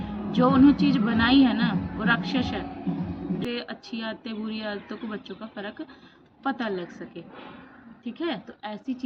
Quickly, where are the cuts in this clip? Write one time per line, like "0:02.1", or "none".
0:03.4